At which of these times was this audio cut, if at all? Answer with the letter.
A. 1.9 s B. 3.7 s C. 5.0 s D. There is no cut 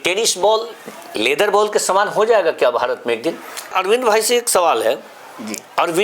B